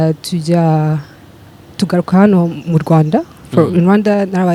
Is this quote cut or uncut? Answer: uncut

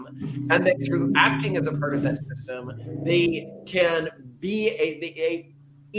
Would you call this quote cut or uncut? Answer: uncut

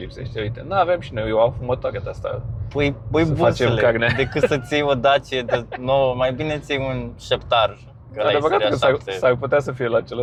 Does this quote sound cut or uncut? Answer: uncut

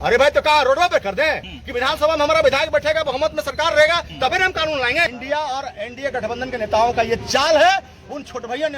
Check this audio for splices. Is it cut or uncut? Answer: cut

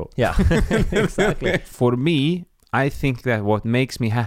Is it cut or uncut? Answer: cut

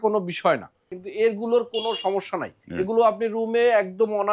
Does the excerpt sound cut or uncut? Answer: cut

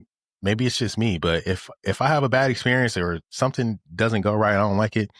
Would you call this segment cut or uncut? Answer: uncut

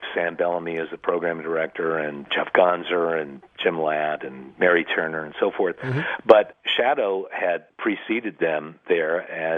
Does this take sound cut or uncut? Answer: cut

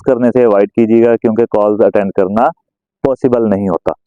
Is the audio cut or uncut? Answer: uncut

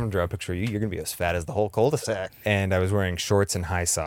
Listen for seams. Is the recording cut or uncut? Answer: cut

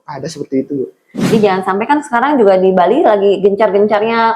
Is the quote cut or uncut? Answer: cut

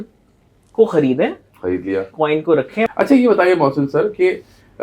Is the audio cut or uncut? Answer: cut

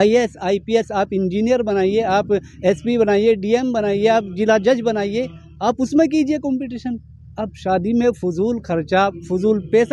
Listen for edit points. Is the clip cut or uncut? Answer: uncut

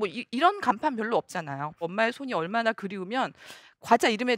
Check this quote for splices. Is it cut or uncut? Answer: cut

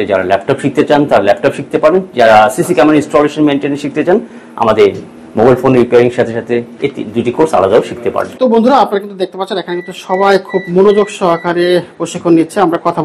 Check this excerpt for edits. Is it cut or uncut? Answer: uncut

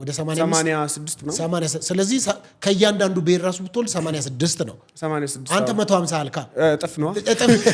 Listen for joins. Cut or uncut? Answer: uncut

